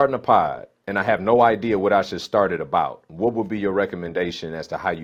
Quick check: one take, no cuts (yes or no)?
yes